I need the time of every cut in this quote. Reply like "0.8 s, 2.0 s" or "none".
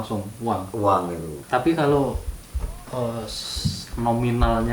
1.3 s